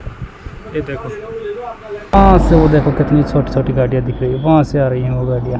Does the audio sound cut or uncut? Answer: cut